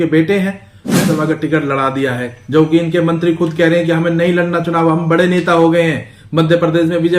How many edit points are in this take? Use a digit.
1